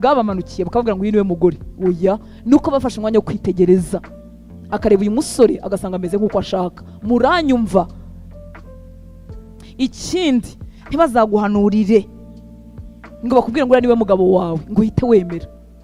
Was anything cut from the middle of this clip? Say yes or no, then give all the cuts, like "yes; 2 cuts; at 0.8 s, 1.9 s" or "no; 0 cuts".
no; 0 cuts